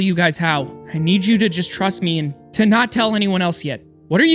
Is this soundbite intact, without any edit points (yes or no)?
no